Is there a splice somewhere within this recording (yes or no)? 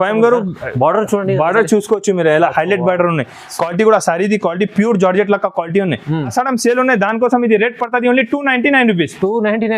yes